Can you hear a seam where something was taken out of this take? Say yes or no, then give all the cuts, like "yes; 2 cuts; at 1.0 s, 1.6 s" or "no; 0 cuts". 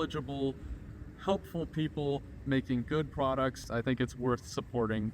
yes; 1 cut; at 3.7 s